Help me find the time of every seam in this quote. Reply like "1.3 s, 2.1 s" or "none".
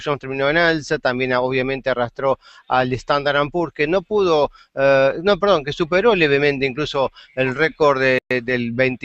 3.4 s